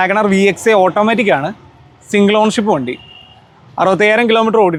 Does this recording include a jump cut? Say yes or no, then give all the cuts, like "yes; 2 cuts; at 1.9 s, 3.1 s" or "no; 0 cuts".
no; 0 cuts